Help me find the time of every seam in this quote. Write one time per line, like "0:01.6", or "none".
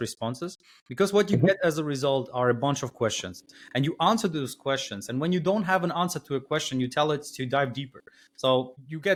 none